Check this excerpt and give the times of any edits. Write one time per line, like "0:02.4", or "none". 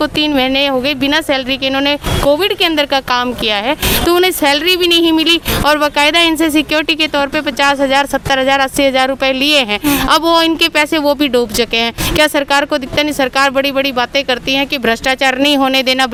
none